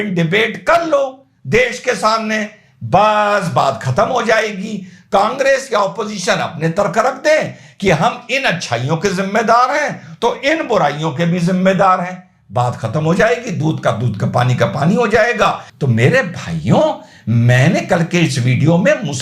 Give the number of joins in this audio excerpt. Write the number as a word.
zero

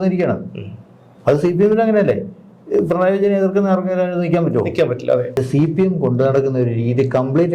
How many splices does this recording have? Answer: one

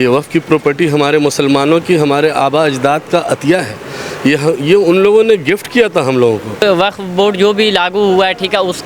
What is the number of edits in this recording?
one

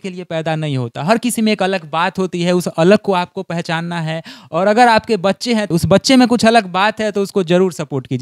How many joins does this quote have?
zero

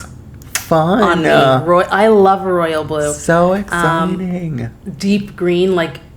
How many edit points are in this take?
zero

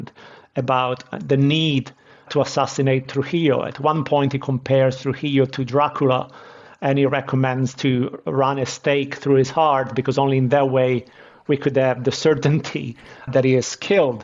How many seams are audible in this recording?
one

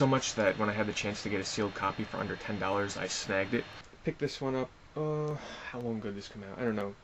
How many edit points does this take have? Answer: one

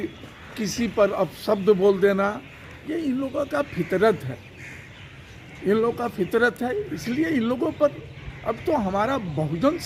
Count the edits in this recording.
zero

